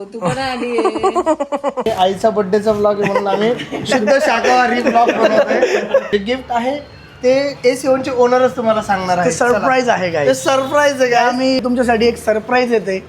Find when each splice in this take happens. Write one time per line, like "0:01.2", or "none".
0:01.9
0:06.1
0:11.6